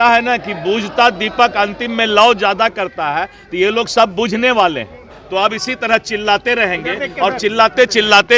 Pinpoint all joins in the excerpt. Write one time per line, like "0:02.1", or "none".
0:05.1